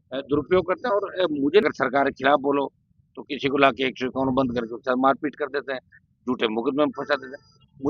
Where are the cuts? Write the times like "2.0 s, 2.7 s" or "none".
1.6 s